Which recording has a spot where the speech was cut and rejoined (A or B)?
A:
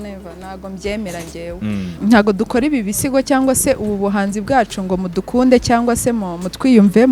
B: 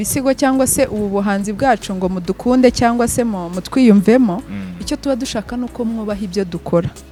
A